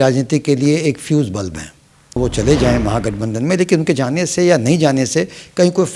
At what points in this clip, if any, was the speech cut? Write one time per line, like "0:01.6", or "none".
0:02.2